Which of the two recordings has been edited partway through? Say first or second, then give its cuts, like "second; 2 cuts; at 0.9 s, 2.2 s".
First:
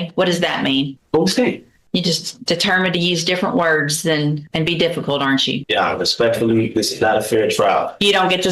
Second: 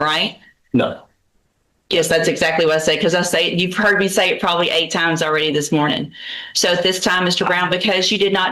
first; 4 cuts; at 1.0 s, 1.7 s, 4.4 s, 5.6 s